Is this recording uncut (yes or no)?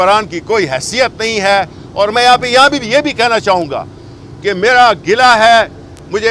yes